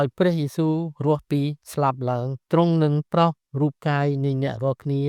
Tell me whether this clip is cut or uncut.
cut